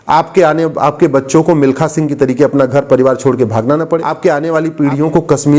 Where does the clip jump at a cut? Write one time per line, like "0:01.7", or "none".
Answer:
0:04.1